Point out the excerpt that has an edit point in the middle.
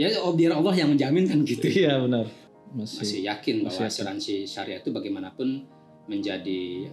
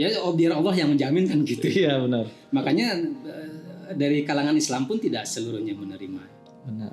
first; 1 cut; at 2.4 s

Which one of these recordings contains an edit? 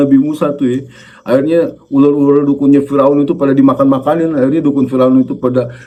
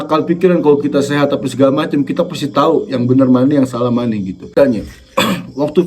second; 1 cut; at 4.5 s

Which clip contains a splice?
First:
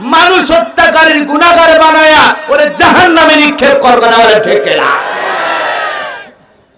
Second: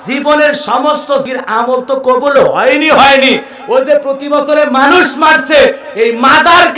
second; 1 cut; at 1.2 s

